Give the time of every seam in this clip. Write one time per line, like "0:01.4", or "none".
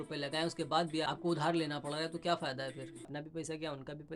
0:01.0
0:03.1